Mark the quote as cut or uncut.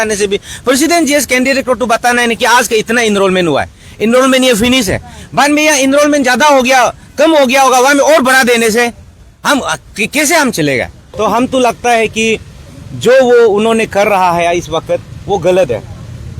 cut